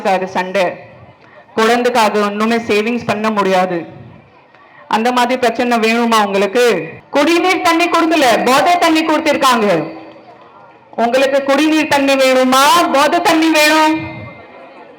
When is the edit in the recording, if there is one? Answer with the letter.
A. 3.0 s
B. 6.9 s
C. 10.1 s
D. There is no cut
B